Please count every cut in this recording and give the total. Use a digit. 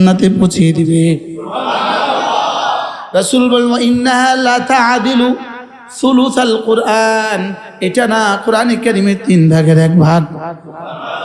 0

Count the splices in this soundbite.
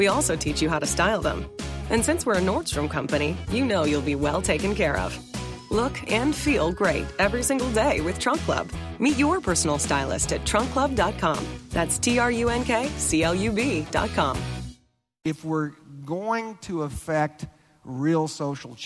1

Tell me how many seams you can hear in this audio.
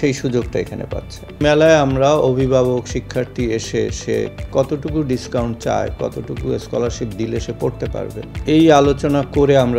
2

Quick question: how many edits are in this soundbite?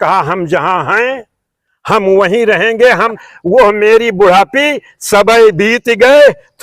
1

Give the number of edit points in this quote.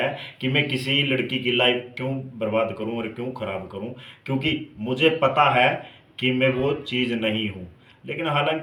0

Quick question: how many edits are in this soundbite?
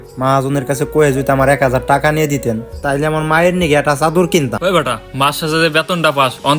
1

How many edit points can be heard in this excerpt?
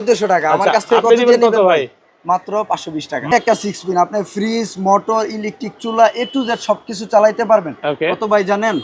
1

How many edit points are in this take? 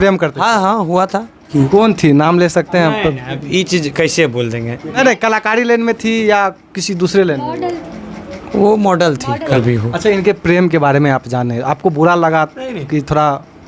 3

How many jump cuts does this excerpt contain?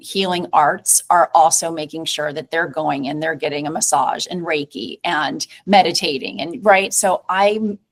0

